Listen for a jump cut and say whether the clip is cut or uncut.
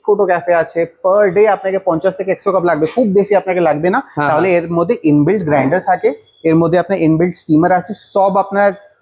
uncut